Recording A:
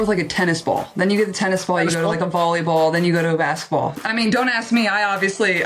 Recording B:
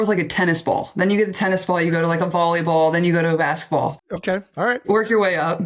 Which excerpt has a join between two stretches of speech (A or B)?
A